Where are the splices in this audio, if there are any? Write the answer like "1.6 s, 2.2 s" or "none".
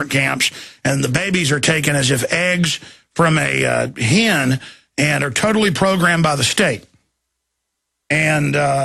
7.1 s